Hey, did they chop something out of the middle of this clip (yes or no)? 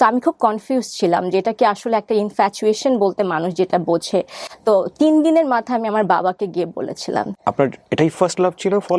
yes